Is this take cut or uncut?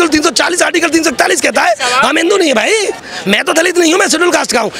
cut